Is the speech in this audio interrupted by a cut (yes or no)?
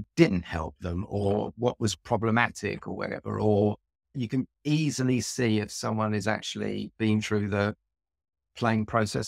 yes